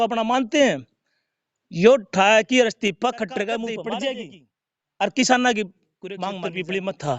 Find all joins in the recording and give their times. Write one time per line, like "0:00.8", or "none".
0:03.8
0:06.1